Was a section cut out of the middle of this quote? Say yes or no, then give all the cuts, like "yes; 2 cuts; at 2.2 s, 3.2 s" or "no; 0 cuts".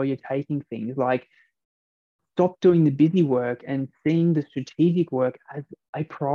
no; 0 cuts